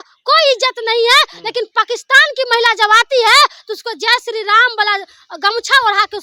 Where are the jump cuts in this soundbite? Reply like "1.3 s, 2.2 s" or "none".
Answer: none